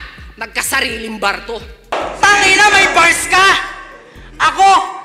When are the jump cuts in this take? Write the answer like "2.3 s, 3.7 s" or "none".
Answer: 1.9 s